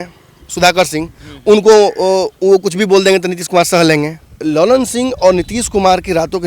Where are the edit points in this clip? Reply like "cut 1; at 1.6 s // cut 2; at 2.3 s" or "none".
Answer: cut 1; at 4.2 s